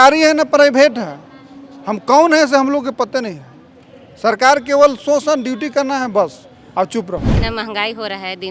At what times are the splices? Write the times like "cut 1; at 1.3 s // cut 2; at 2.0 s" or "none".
cut 1; at 7.4 s